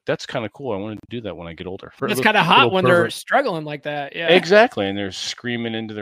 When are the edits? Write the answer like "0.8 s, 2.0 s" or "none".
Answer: 1.9 s